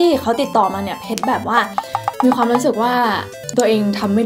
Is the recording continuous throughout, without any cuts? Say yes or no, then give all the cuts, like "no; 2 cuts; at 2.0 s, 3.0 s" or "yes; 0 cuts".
yes; 0 cuts